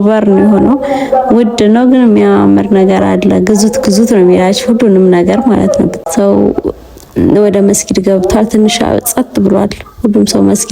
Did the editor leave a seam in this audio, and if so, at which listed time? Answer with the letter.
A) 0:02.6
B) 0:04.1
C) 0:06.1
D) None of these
C